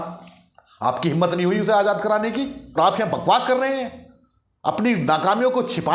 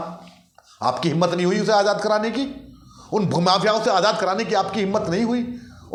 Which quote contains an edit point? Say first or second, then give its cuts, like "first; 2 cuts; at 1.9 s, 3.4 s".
first; 1 cut; at 2.6 s